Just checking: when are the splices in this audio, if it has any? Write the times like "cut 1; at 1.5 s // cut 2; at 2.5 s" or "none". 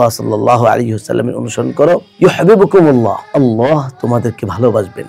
cut 1; at 3.2 s